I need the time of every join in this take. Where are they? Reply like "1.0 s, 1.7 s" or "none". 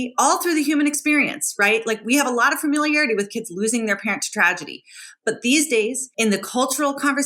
6.0 s